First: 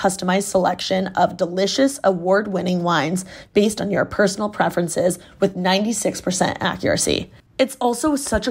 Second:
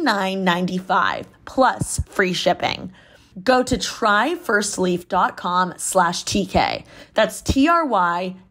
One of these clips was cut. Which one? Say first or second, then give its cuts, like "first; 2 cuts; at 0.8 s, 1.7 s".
first; 1 cut; at 7.4 s